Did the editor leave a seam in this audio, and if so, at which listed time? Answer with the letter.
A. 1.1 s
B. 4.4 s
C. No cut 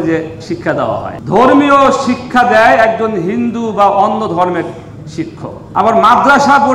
A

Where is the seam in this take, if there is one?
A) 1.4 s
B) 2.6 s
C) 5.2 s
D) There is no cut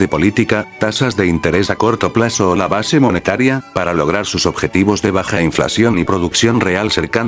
C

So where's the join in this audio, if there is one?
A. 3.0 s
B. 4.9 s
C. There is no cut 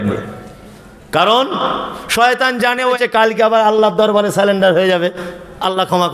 A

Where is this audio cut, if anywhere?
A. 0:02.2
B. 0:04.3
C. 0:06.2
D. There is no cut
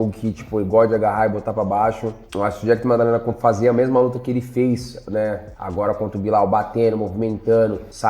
D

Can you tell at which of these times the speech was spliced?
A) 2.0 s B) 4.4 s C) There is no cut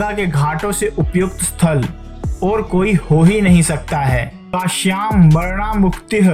B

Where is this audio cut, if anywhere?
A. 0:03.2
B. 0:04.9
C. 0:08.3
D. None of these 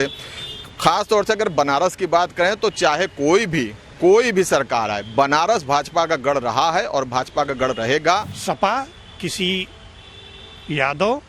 C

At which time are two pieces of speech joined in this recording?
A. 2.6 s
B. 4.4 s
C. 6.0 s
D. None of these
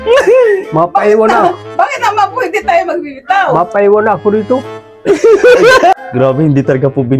C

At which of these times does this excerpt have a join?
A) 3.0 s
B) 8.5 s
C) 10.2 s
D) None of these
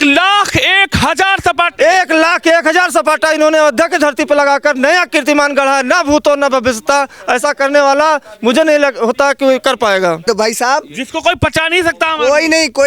C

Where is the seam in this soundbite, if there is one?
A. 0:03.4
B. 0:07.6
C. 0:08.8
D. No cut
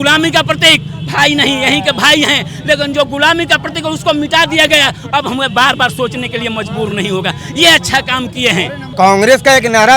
C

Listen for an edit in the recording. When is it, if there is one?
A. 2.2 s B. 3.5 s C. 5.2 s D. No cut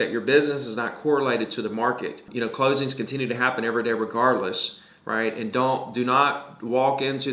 A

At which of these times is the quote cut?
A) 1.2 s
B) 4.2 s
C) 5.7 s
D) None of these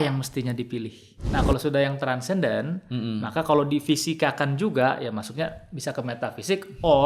A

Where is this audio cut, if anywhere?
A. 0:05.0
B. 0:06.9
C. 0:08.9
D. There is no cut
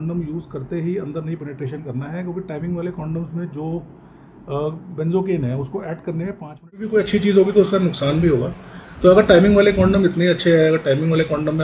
B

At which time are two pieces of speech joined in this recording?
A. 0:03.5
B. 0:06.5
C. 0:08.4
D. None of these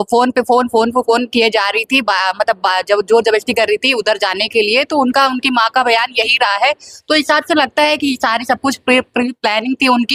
D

